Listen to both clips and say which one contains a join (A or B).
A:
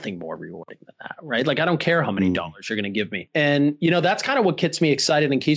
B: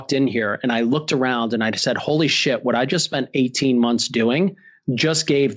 A